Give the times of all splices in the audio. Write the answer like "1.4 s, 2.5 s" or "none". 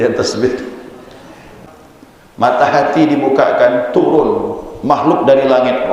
1.6 s

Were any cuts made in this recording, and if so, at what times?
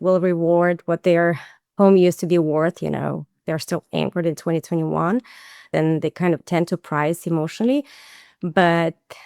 5.7 s

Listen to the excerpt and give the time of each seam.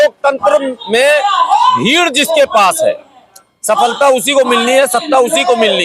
none

